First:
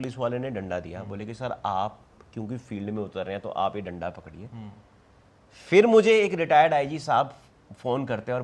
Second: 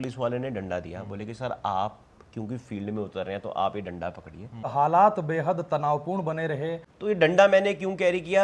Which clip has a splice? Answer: second; 2 cuts; at 4.7 s, 6.9 s

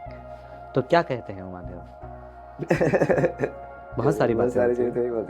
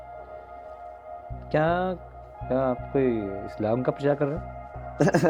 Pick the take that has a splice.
first; 1 cut; at 3.8 s

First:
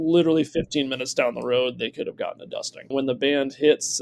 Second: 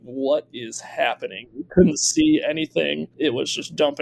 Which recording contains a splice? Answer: first; 1 cut; at 2.9 s

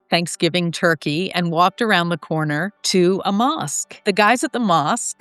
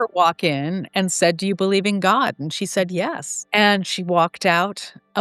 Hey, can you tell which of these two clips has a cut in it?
first; 2 cuts; at 2.7 s, 4.0 s

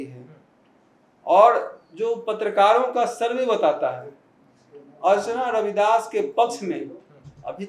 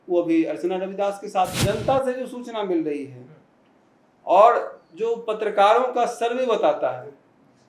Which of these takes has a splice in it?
second; 1 cut; at 1.6 s

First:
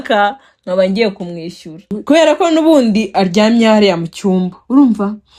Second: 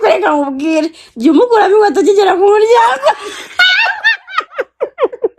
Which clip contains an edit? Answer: first; 1 cut; at 1.9 s

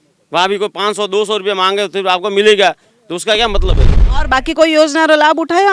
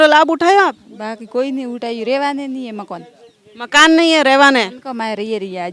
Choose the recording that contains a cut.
first; 1 cut; at 3.9 s

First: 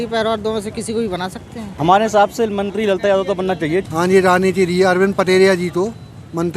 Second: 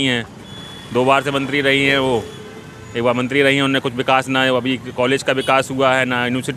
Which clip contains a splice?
first; 2 cuts; at 1.6 s, 3.9 s

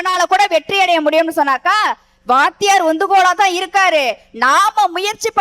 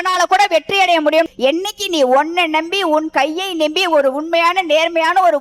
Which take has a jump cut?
second; 1 cut; at 1.3 s

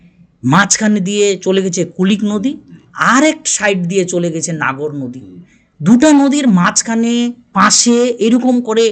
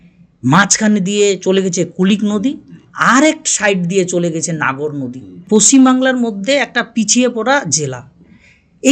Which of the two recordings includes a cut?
second; 1 cut; at 5.3 s

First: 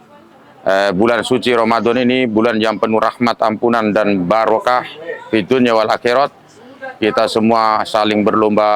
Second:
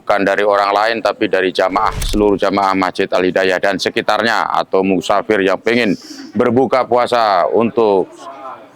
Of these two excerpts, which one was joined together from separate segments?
second; 1 cut; at 2.0 s

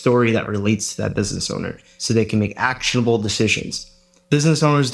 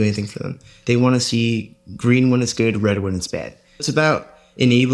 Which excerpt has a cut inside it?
second; 1 cut; at 3.9 s

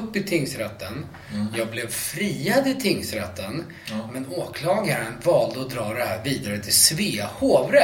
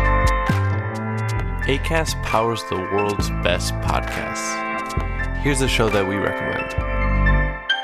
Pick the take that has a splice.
second; 1 cut; at 0.9 s

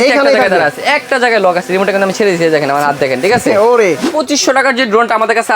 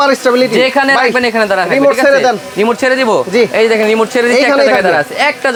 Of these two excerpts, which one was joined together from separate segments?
first; 1 cut; at 4.2 s

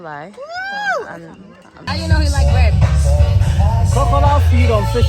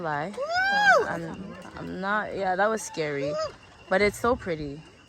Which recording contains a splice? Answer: first; 1 cut; at 1.7 s

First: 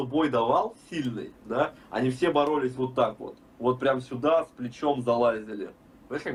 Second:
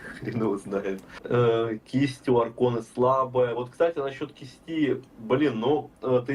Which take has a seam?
second; 1 cut; at 1.1 s

